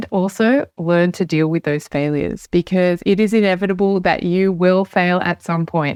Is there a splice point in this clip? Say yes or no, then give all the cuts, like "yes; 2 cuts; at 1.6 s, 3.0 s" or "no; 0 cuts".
no; 0 cuts